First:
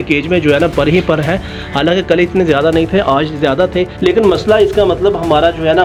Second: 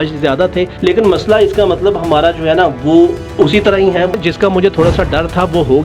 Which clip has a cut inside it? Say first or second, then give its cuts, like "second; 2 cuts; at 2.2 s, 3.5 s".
second; 1 cut; at 4.1 s